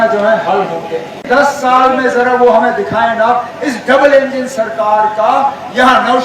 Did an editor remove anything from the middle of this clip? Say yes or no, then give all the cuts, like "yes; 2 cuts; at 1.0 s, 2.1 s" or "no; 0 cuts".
yes; 1 cut; at 1.6 s